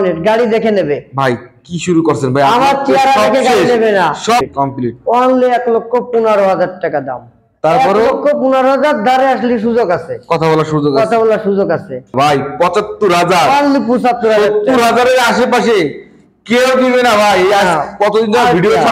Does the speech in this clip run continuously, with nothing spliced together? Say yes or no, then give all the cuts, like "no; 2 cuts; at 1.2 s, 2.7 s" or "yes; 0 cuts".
no; 2 cuts; at 4.4 s, 12.1 s